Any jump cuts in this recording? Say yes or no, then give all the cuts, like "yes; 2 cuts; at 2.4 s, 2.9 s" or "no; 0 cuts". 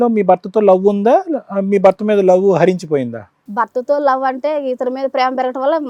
no; 0 cuts